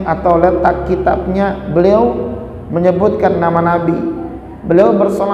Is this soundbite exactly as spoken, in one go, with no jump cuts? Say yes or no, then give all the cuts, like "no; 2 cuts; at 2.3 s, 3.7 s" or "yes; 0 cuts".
yes; 0 cuts